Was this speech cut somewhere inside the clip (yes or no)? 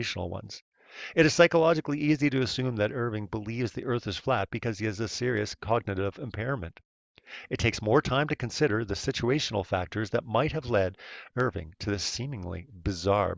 yes